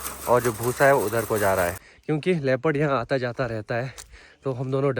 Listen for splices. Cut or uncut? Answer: cut